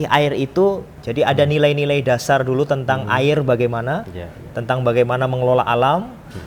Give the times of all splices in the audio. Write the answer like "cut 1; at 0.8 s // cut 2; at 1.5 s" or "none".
cut 1; at 1.0 s